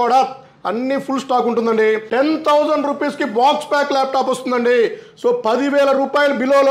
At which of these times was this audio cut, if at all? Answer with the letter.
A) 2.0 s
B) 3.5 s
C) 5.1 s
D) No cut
A